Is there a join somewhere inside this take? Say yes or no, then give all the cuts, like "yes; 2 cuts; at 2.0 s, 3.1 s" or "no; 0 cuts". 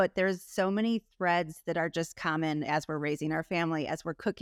no; 0 cuts